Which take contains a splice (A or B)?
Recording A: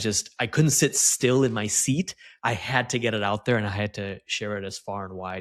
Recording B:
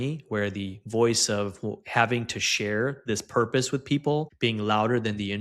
B